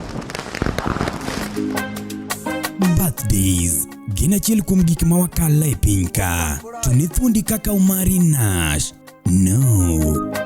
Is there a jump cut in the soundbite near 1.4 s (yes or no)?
yes